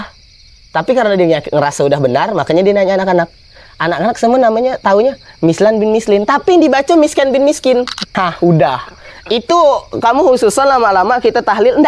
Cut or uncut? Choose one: cut